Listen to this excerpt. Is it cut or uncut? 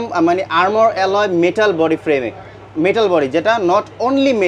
uncut